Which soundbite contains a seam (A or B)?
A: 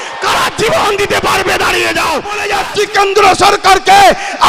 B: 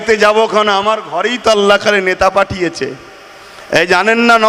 A